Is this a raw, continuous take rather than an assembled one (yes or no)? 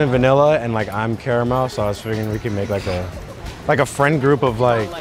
yes